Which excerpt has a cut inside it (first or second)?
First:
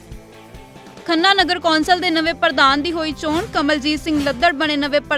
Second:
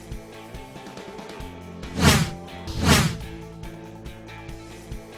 first